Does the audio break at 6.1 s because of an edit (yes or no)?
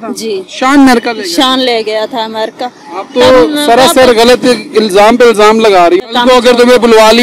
yes